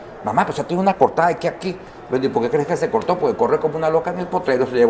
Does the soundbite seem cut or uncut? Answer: uncut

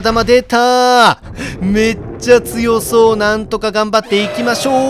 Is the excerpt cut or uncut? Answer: uncut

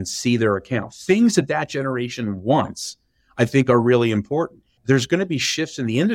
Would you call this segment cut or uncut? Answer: cut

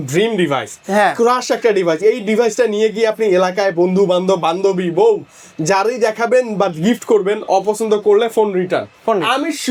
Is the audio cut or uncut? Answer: uncut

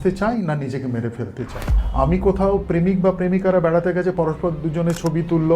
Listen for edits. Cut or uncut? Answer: cut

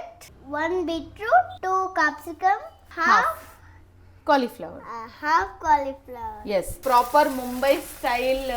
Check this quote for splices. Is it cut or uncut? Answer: cut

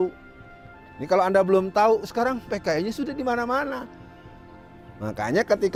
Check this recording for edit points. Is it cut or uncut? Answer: uncut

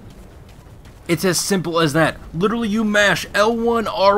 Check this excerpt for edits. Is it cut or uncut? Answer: uncut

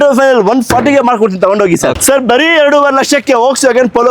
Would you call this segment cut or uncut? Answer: cut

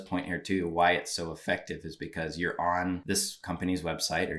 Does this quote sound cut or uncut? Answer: cut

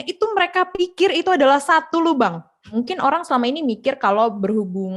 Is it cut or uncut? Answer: cut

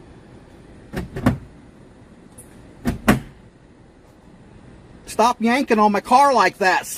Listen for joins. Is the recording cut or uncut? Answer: uncut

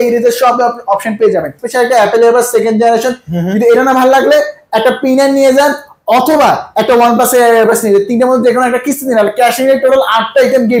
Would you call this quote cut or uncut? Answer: cut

